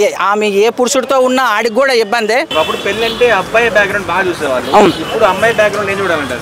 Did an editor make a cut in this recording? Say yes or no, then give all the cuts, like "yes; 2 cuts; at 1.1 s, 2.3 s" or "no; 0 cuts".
yes; 1 cut; at 2.5 s